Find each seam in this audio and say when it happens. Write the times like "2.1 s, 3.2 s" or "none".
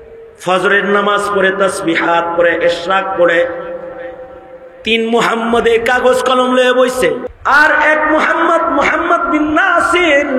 7.3 s